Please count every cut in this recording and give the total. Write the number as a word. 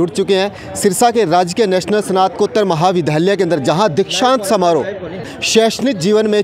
one